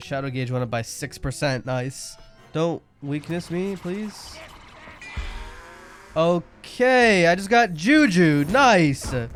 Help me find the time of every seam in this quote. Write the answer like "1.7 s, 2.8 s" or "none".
none